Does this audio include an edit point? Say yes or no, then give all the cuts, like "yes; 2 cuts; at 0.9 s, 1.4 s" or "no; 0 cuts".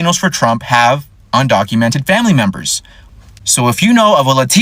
yes; 1 cut; at 3.0 s